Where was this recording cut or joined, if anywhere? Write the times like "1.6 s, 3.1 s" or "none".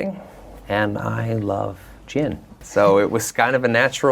2.6 s

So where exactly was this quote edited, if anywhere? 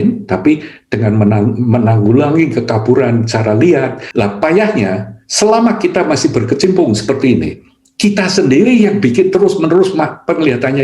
4.0 s

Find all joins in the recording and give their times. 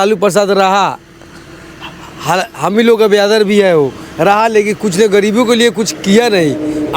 none

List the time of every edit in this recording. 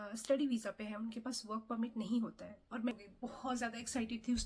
2.9 s

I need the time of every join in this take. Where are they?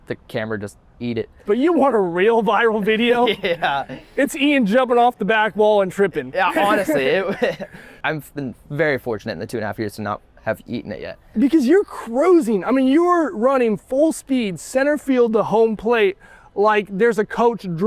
1.4 s, 8.0 s, 11.2 s

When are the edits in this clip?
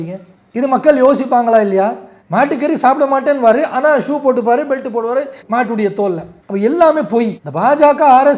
2.1 s

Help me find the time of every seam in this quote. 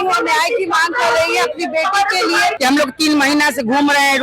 2.6 s

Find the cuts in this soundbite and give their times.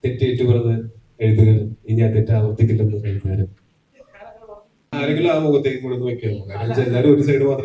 4.9 s

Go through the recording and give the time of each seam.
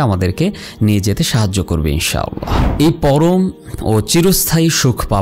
2.6 s

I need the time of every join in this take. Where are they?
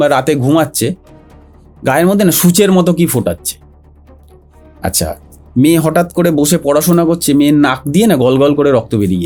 none

